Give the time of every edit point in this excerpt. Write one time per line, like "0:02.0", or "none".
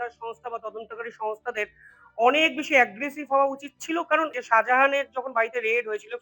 0:04.4